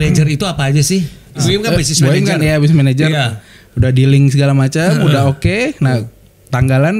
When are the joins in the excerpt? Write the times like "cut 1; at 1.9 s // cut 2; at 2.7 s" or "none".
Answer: cut 1; at 1.4 s